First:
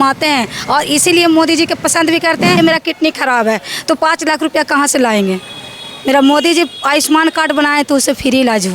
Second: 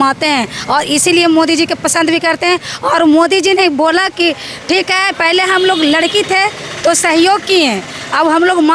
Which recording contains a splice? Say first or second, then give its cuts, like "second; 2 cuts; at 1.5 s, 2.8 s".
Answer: first; 1 cut; at 2.6 s